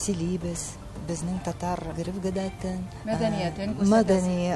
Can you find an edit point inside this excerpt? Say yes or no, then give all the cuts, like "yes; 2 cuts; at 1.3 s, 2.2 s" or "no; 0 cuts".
yes; 2 cuts; at 1.9 s, 2.9 s